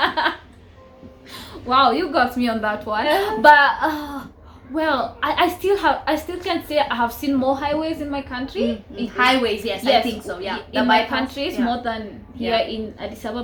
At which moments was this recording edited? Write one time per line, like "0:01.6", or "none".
none